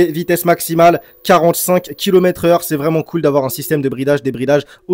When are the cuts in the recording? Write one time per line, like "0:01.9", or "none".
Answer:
none